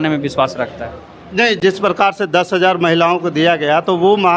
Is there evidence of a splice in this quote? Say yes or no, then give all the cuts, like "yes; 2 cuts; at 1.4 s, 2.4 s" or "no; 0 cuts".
no; 0 cuts